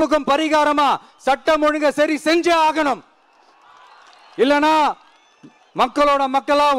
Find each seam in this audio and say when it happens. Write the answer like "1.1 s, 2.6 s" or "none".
none